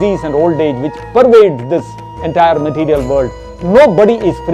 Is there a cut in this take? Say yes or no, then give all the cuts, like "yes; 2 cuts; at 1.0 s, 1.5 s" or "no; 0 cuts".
no; 0 cuts